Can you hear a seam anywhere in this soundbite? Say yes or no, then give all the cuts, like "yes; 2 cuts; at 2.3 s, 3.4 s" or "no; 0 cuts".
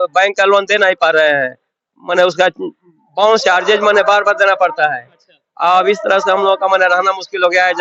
no; 0 cuts